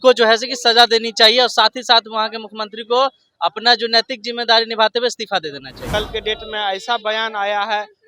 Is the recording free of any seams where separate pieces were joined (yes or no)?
no